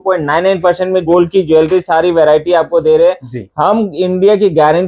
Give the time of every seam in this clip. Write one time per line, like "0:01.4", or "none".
0:01.1